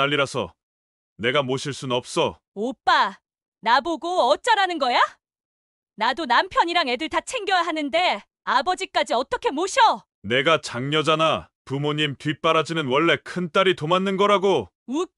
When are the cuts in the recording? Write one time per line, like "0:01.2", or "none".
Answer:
0:02.4